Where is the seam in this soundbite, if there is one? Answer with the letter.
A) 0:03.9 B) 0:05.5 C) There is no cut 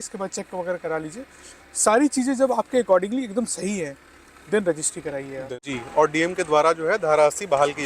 B